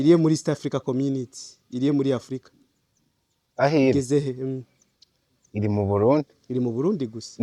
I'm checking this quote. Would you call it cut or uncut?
uncut